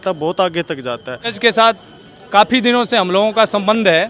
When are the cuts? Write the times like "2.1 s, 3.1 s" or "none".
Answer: 1.4 s